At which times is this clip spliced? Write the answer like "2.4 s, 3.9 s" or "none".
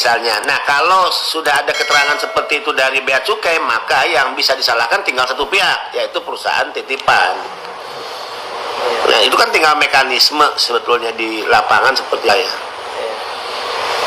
12.3 s